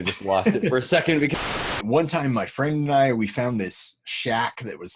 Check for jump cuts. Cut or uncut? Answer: cut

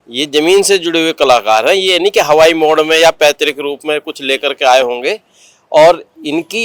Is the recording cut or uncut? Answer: uncut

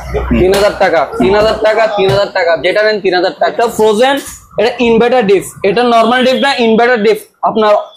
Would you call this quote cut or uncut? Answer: cut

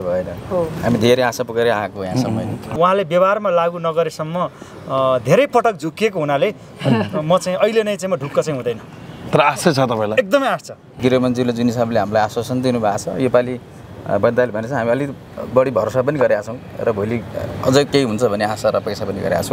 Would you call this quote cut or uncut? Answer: cut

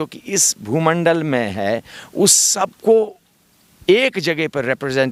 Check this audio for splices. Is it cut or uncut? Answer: uncut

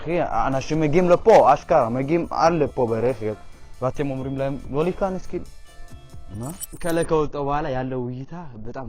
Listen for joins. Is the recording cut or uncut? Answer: cut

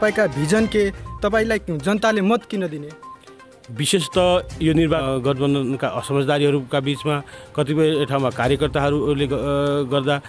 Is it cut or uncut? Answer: cut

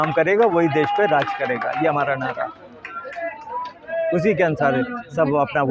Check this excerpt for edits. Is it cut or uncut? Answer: uncut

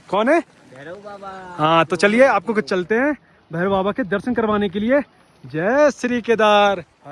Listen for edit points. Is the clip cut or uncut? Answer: uncut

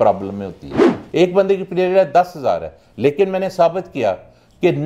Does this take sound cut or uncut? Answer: cut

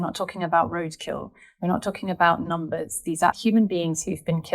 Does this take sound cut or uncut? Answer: cut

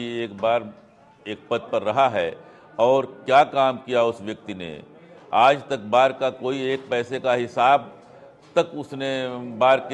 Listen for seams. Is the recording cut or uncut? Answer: uncut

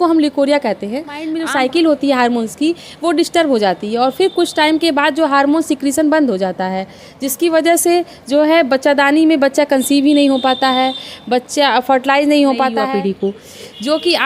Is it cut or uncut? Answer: cut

